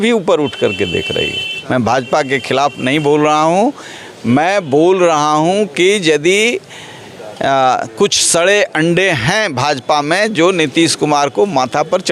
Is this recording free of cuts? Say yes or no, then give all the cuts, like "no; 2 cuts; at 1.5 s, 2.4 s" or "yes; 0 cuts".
no; 1 cut; at 1.5 s